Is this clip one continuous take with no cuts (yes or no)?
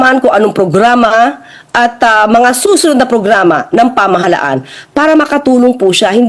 yes